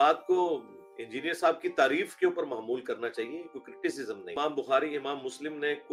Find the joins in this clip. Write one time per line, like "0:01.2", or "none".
0:04.3